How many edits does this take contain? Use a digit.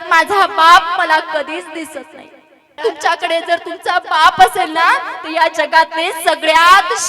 1